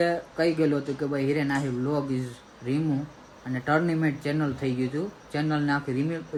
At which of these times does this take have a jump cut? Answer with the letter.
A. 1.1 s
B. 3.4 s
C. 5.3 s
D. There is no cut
D